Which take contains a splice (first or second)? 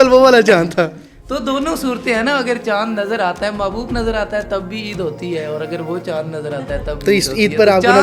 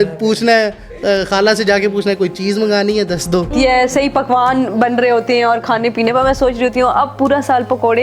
second